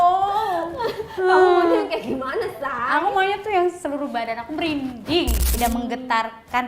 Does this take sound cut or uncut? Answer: cut